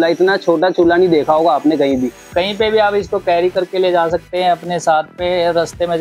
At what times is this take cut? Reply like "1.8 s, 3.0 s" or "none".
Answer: none